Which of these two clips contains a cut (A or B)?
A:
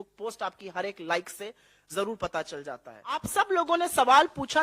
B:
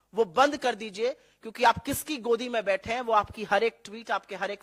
A